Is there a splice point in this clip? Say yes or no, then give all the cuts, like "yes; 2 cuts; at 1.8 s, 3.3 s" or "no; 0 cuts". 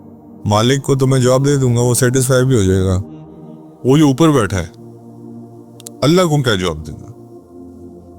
yes; 1 cut; at 6.8 s